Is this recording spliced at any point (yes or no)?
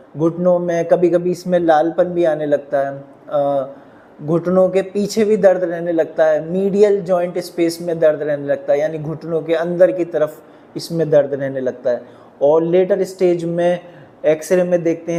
no